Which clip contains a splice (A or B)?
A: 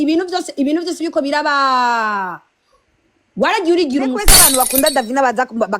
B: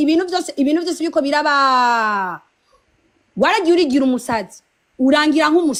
A